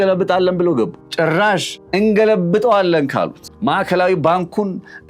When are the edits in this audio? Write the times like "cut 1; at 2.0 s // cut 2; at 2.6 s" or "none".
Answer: cut 1; at 1.0 s // cut 2; at 1.8 s // cut 3; at 3.4 s